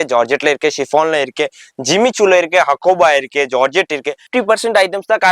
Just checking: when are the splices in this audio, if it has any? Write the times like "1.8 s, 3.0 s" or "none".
4.2 s